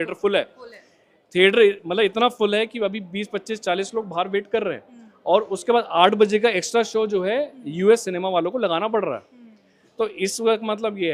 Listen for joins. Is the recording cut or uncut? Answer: uncut